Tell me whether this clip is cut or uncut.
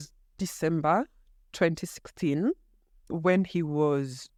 uncut